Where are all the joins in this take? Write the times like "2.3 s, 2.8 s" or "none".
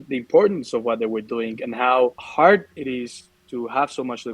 2.2 s

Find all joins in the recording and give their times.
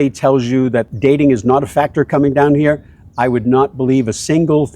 0.9 s

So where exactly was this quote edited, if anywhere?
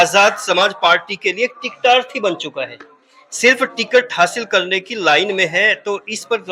none

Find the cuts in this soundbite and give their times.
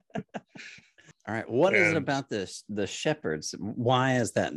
1.1 s

